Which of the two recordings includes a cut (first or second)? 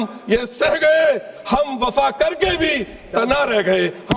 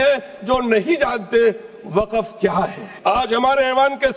second